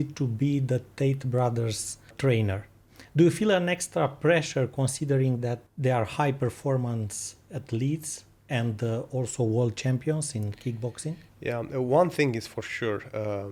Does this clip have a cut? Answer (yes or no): no